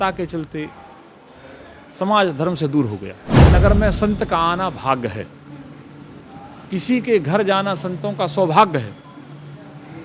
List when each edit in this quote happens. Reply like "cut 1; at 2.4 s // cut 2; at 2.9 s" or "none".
cut 1; at 3.5 s